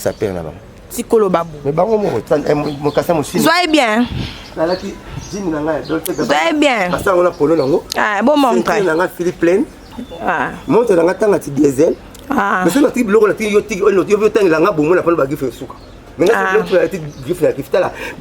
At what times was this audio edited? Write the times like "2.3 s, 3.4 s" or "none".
2.2 s

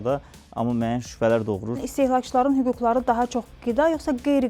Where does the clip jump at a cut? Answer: 1.9 s

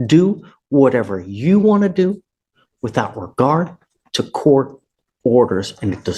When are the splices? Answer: none

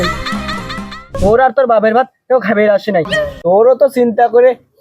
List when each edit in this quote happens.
1.1 s

